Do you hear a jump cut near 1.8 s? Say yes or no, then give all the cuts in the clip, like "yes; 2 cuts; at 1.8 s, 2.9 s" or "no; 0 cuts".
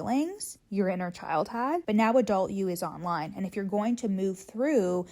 yes; 1 cut; at 1.8 s